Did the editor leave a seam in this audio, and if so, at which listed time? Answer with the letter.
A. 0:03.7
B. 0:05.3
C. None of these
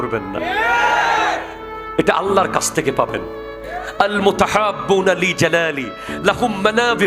A